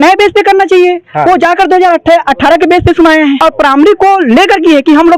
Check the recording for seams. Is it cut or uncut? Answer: cut